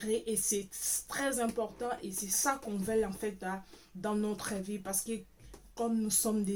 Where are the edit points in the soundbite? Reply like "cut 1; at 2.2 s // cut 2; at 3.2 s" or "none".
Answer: none